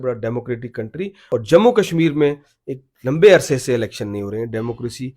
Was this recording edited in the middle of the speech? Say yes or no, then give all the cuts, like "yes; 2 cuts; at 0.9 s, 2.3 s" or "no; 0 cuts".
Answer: yes; 1 cut; at 1.2 s